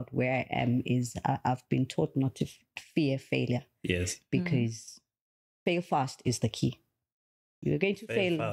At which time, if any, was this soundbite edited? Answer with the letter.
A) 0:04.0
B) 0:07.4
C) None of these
C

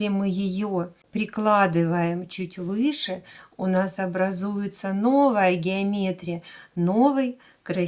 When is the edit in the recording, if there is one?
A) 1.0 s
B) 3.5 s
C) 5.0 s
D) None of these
A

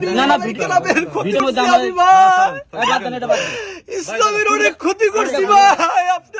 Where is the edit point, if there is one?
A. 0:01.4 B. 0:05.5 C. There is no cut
A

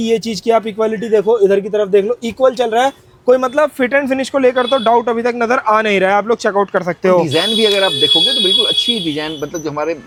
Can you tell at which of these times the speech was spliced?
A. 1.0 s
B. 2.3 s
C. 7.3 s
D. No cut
D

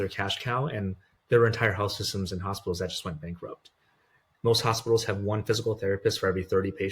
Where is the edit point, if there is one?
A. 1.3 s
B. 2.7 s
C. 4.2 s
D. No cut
C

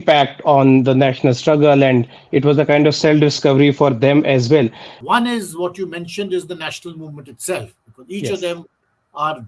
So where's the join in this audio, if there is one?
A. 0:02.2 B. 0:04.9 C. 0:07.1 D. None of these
B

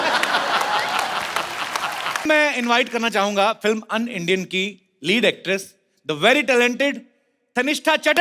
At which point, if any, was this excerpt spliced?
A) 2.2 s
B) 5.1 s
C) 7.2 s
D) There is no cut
A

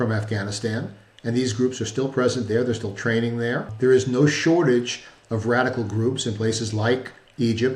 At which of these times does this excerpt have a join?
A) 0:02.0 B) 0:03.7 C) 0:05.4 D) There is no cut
B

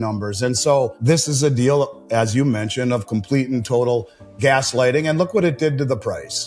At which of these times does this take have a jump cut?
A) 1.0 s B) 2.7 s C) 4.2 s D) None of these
A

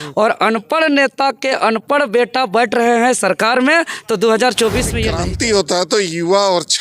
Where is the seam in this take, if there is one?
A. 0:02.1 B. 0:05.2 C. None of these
B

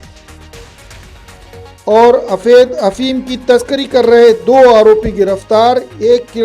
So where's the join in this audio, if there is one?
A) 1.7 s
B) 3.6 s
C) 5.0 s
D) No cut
A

